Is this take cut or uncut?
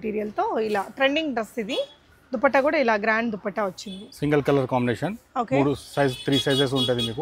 uncut